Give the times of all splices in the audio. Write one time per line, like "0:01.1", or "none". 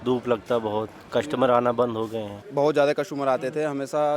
0:02.4